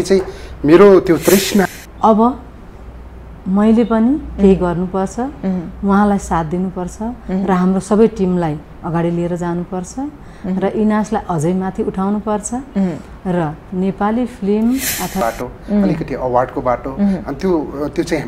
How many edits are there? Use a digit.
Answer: 2